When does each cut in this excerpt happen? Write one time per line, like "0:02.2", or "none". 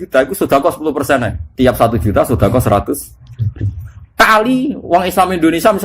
0:01.4

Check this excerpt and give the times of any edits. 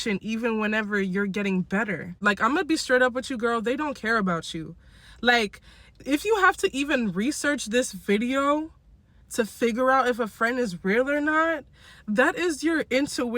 0:02.2

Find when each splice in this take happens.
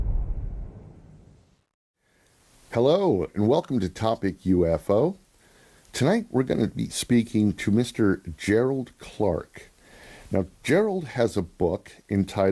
none

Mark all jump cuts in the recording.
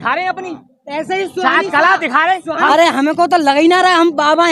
0:02.7

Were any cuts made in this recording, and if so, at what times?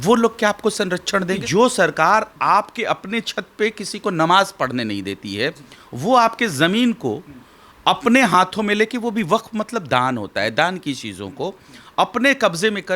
0:01.4

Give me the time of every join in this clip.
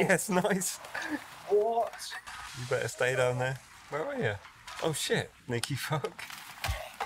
0:02.1

